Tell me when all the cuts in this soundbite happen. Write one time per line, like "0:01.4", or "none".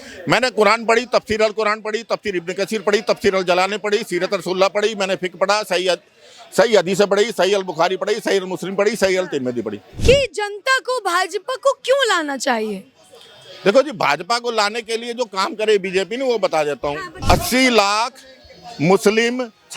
0:09.8
0:17.1